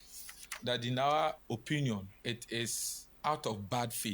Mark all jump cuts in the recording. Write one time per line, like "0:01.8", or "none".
0:01.4
0:02.5

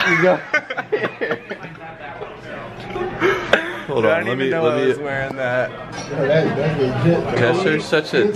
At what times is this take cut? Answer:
0:07.3

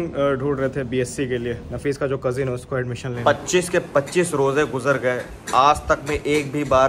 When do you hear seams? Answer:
0:03.1

